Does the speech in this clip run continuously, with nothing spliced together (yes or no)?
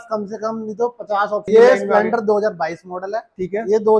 no